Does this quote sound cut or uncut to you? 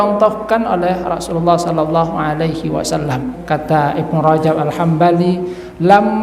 cut